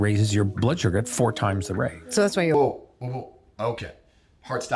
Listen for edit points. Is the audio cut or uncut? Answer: uncut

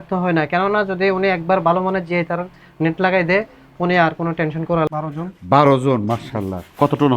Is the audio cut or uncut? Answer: cut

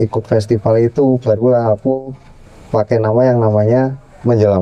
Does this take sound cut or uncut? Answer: uncut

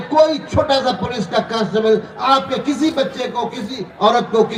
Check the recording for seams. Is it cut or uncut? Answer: uncut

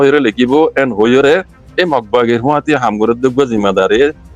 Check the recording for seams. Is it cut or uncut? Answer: uncut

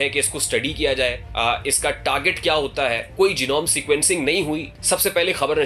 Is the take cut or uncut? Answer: cut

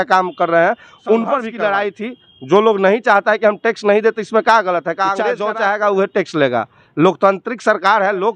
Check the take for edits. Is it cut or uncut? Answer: cut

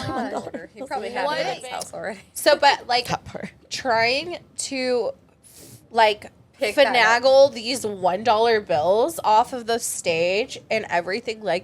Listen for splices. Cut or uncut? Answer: cut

